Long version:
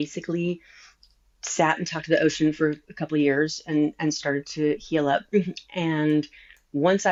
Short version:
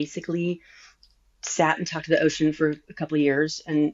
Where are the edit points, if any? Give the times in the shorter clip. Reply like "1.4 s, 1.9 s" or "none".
none